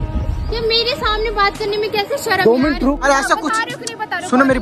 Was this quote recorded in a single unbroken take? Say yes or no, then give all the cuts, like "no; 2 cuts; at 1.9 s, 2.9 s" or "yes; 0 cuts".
no; 1 cut; at 3.0 s